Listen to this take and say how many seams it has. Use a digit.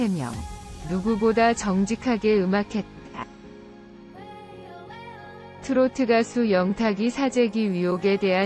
2